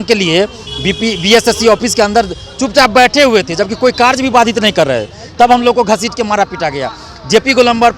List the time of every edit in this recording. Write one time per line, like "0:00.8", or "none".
none